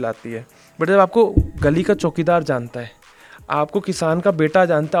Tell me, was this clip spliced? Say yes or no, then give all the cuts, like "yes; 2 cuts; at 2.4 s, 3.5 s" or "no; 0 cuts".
no; 0 cuts